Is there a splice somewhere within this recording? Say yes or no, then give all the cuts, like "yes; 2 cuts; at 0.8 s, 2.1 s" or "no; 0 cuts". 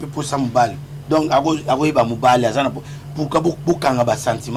no; 0 cuts